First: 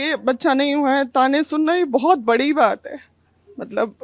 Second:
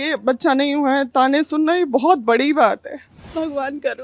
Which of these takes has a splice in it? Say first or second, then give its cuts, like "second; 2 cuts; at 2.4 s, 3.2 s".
second; 1 cut; at 3.1 s